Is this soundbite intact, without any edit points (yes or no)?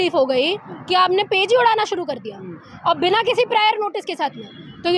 yes